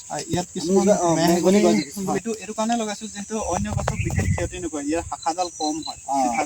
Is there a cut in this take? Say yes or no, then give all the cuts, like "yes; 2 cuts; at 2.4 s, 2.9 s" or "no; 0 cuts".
yes; 1 cut; at 2.2 s